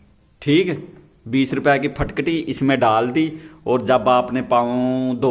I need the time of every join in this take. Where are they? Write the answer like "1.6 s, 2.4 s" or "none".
none